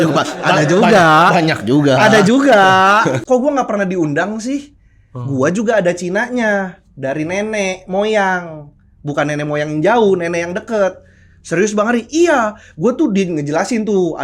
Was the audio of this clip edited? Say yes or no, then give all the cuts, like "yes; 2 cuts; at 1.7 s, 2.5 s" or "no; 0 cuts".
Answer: yes; 1 cut; at 3.2 s